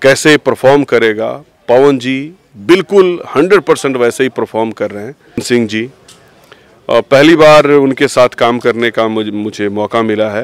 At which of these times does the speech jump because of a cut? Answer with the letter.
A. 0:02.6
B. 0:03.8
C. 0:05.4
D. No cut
C